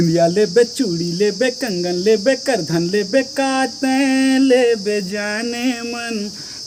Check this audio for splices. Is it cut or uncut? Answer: uncut